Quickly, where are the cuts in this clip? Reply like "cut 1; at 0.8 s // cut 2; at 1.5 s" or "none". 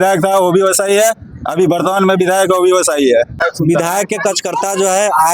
cut 1; at 3.4 s

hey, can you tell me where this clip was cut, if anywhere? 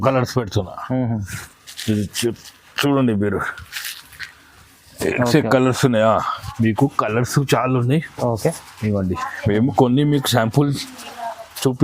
cut 1; at 6.4 s

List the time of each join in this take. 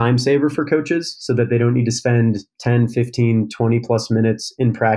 none

